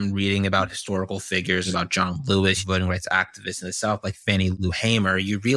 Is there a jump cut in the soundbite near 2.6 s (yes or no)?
yes